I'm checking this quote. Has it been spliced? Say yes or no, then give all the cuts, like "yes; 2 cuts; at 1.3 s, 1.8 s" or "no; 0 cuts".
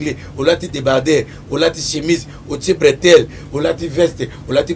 no; 0 cuts